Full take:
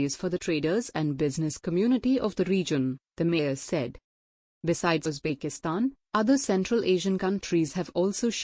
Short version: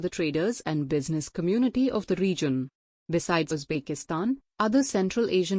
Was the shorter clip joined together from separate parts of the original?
yes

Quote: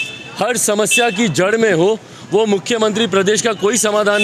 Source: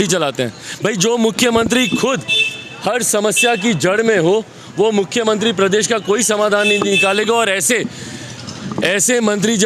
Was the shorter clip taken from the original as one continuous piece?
yes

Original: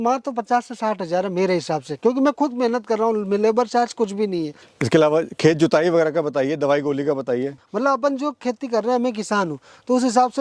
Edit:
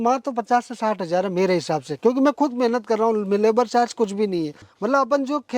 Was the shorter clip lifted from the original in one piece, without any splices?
no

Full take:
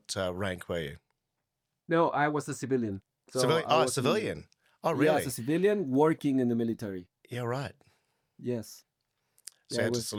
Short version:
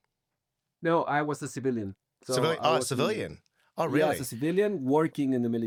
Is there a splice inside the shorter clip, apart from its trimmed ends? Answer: no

